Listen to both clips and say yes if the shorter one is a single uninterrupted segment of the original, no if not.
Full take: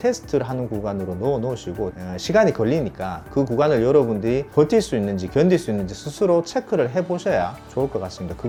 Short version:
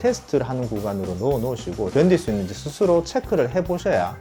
no